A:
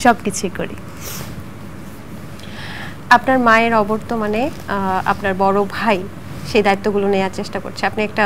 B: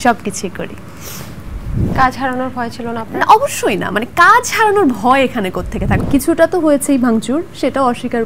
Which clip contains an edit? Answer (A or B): B